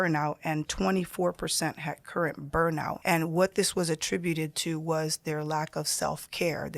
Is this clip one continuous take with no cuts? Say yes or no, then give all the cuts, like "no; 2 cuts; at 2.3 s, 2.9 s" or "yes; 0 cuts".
no; 1 cut; at 3.0 s